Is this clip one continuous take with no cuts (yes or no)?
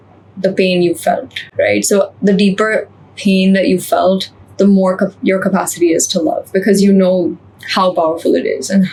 yes